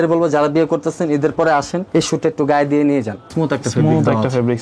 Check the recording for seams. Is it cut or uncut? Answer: cut